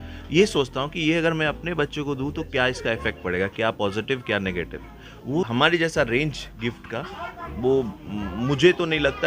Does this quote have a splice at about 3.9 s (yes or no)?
no